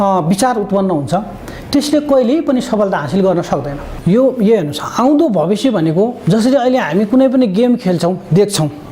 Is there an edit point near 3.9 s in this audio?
yes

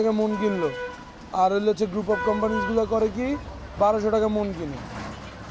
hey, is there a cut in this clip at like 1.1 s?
no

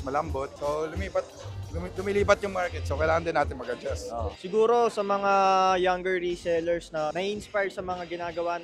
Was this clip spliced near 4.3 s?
yes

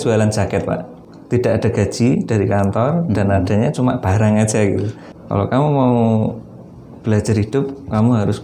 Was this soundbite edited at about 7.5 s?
no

